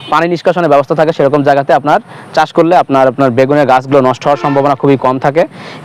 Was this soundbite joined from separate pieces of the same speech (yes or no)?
no